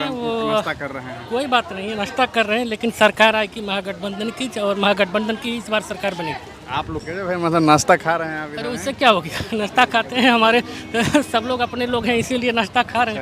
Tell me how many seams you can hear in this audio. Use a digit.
1